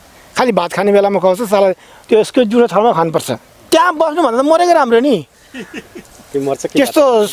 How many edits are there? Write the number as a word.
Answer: one